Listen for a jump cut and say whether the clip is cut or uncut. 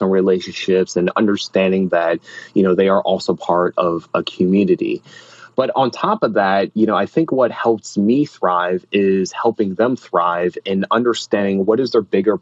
uncut